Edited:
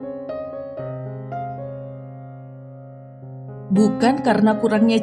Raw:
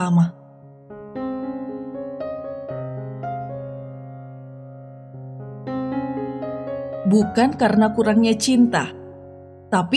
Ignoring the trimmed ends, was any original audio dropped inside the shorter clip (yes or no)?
yes